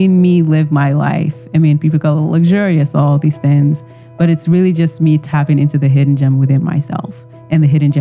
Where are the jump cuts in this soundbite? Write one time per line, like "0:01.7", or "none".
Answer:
none